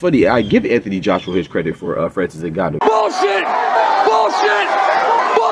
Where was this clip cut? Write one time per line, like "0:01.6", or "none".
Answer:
0:02.8

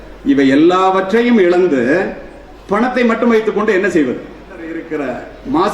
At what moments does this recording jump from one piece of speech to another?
0:04.8

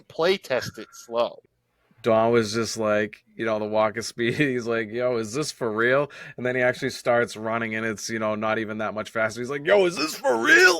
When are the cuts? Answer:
0:01.4

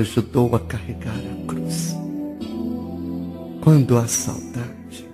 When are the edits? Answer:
0:02.9

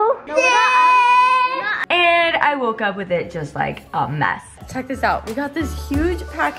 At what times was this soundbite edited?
0:01.7
0:04.6

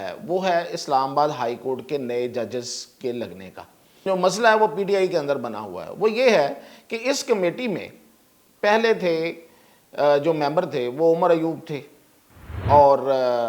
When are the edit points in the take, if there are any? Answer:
0:04.1

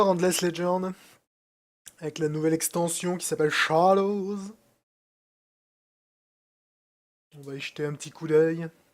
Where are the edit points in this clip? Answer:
none

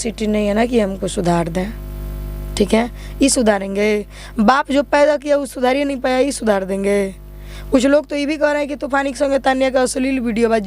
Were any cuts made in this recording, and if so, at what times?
none

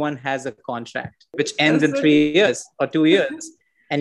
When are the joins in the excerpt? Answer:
0:01.3

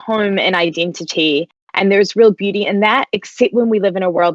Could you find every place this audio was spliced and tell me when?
none

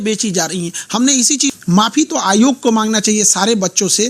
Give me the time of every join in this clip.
0:01.5

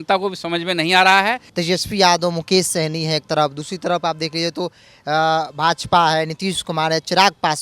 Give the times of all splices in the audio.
0:01.5

